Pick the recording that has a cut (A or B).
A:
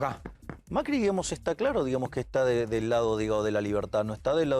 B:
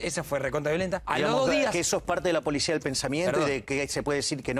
B